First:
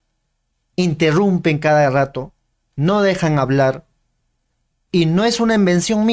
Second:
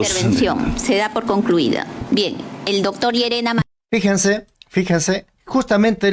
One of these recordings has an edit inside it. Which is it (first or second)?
second